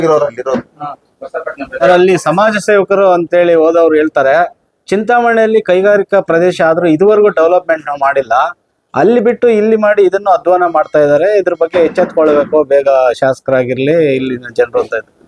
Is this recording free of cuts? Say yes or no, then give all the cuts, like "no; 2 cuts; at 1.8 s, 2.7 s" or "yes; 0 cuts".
no; 1 cut; at 1.9 s